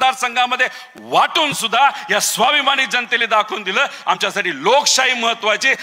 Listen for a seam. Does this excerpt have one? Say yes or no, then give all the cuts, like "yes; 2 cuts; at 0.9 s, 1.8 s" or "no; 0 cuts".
no; 0 cuts